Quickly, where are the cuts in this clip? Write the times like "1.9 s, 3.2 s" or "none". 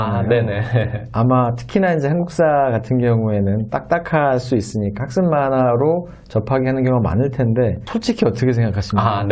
none